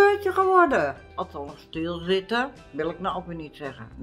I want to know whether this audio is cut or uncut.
cut